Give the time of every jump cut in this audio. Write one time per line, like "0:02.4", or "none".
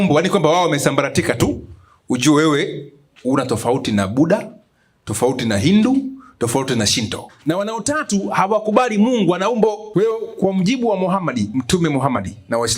0:07.3
0:09.8